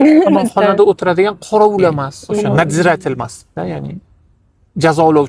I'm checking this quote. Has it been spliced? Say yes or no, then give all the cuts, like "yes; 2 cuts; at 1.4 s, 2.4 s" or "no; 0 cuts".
yes; 1 cut; at 2.2 s